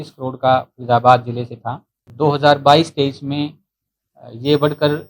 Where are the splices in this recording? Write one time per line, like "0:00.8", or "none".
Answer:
0:02.1